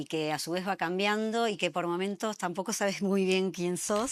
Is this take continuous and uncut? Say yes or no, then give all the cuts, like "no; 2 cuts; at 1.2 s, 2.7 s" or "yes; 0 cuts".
yes; 0 cuts